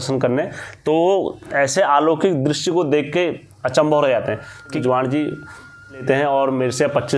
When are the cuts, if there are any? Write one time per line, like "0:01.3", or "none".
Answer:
0:04.8
0:06.0